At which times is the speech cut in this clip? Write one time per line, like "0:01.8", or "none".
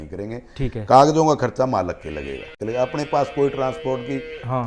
0:02.5

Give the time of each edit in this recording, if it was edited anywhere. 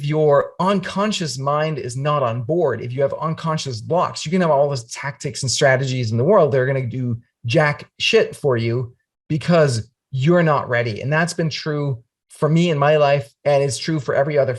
0:13.3

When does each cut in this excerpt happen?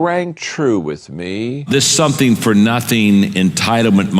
0:01.7

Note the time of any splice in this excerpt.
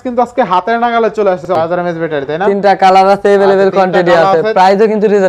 0:01.5

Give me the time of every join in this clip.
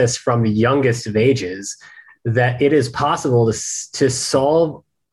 none

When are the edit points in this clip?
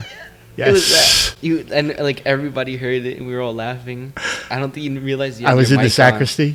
none

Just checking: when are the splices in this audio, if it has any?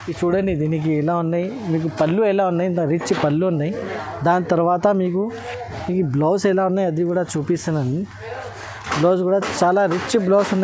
none

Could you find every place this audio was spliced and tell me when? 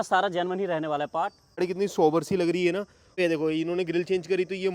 0:01.6
0:03.2

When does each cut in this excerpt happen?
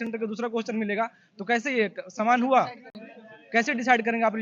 none

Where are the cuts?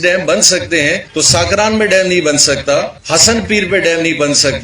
0:01.0
0:03.0

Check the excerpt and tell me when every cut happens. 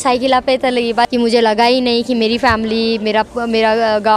0:01.1

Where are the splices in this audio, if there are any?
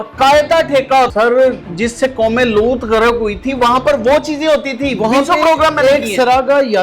0:01.1

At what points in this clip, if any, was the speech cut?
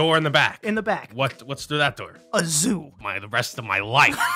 0:02.1
0:03.0

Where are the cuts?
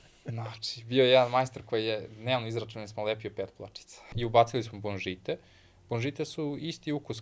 0:04.1

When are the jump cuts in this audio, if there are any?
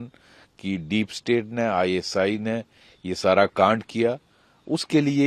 none

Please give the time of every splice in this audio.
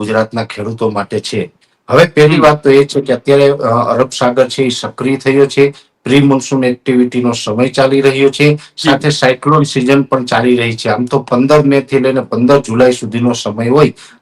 none

